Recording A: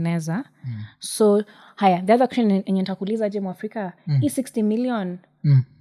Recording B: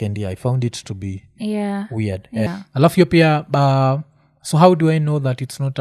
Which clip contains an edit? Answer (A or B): B